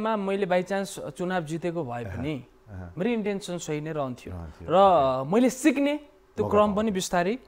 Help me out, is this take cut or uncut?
uncut